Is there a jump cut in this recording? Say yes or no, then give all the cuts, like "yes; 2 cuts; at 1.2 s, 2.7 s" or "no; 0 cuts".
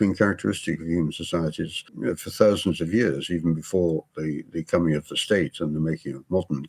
yes; 1 cut; at 1.8 s